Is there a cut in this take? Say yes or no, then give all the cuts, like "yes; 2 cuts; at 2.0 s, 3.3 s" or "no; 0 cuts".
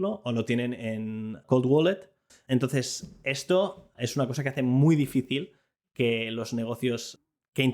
yes; 1 cut; at 2.3 s